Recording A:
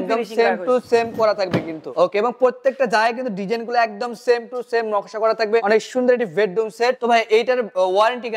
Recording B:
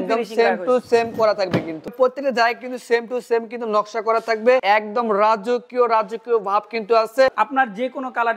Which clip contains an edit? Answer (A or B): B